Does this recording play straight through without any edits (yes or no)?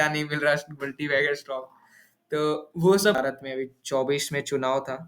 no